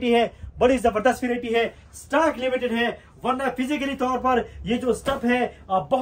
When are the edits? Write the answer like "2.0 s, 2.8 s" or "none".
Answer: none